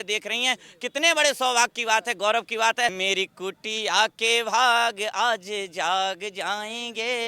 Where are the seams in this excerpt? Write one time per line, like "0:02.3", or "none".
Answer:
0:03.0